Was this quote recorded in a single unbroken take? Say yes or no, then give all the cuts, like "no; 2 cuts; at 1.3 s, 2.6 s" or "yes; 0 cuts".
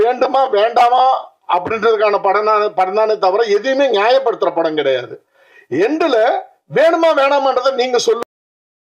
yes; 0 cuts